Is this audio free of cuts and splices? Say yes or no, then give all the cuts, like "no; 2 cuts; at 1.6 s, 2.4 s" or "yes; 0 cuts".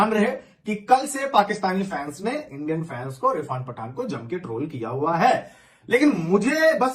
yes; 0 cuts